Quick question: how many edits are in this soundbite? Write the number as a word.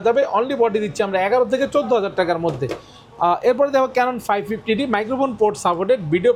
zero